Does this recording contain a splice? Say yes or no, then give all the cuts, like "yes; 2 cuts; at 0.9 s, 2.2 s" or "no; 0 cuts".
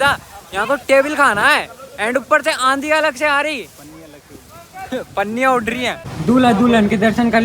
yes; 1 cut; at 6.1 s